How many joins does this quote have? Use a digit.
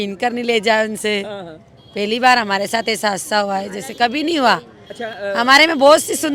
0